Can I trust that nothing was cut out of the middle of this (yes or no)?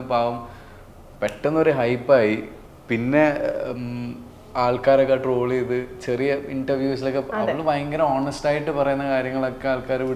yes